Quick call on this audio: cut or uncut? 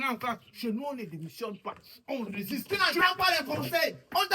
cut